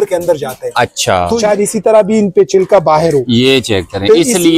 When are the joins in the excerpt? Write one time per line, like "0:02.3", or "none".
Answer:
0:01.4